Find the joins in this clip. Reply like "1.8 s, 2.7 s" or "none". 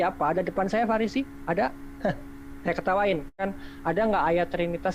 3.4 s